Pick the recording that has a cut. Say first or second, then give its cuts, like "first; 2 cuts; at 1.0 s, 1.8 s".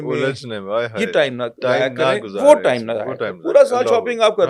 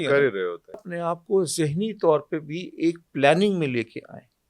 second; 1 cut; at 0.9 s